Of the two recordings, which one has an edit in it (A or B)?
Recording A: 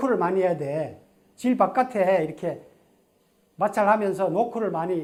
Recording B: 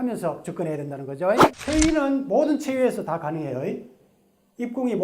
B